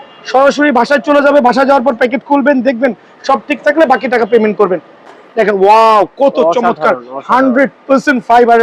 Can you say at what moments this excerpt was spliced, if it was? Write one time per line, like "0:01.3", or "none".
0:05.0